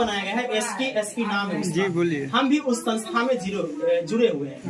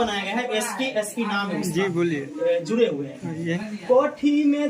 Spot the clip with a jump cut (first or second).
second